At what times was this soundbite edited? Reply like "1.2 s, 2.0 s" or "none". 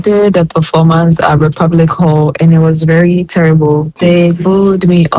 4.0 s